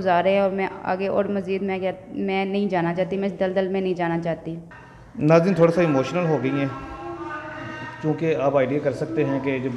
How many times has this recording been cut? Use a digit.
0